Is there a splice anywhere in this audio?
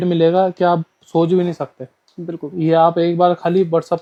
no; 0 cuts

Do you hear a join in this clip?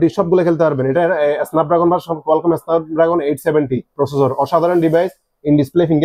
no; 0 cuts

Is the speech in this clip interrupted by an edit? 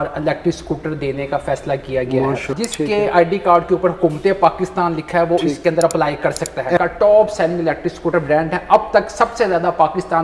yes; 2 cuts; at 2.5 s, 6.8 s

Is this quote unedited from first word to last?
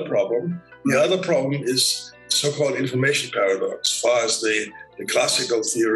no; 2 cuts; at 2.1 s, 3.9 s

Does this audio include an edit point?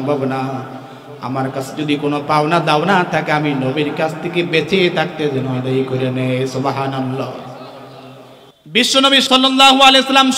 yes; 1 cut; at 9.2 s

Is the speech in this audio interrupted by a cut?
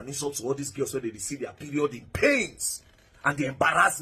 no; 0 cuts

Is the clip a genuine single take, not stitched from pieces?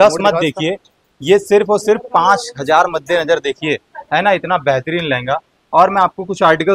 yes; 0 cuts

